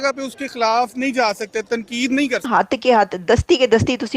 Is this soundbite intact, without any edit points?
no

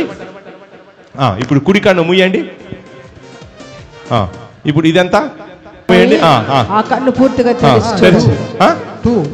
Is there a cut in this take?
yes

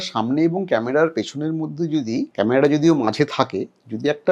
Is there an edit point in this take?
yes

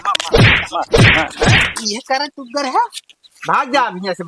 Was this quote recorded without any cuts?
no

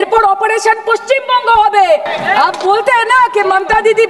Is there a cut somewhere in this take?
yes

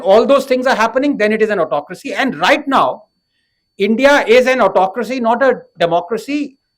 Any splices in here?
no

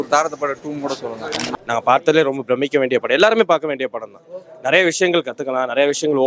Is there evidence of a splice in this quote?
yes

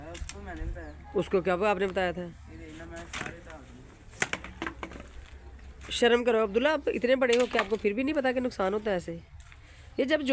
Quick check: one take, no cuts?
yes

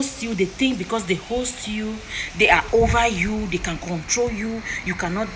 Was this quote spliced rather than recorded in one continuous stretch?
no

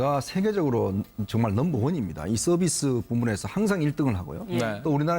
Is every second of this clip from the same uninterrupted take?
no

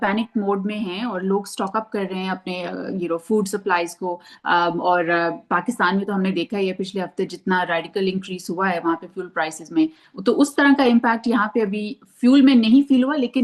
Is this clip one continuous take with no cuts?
yes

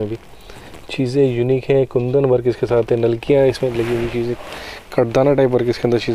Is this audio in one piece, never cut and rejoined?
yes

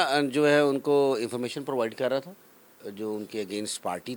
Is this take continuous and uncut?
yes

